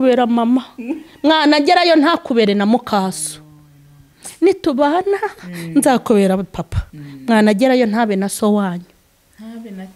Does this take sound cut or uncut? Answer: uncut